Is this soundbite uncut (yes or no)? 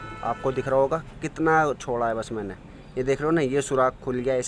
yes